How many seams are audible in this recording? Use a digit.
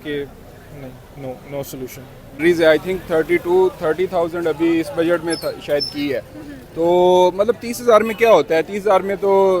1